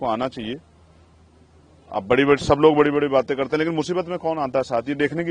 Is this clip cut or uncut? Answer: uncut